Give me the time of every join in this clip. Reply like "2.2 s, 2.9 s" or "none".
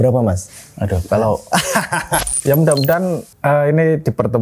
2.1 s, 3.3 s